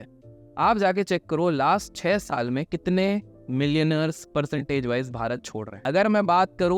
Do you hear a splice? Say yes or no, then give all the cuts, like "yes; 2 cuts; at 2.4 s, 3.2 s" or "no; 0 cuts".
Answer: yes; 1 cut; at 5.7 s